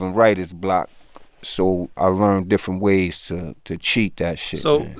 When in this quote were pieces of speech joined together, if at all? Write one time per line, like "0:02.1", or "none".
0:02.0